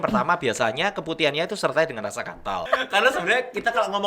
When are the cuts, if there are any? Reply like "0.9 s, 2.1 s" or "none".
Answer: 2.6 s